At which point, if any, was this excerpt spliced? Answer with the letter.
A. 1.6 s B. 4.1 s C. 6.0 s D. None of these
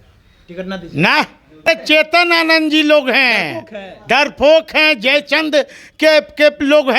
A